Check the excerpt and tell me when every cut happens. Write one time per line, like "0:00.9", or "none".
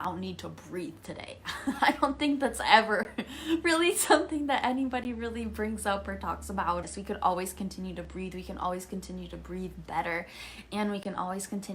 0:06.8